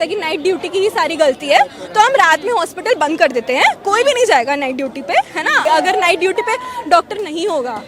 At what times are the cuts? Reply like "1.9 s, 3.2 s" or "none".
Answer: 5.6 s